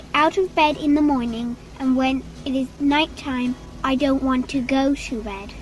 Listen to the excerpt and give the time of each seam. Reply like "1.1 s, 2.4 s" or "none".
2.7 s, 3.7 s